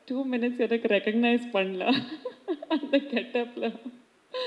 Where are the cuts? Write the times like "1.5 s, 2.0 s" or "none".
none